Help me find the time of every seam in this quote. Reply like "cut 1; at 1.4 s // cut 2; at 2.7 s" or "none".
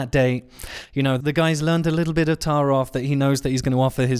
cut 1; at 1.2 s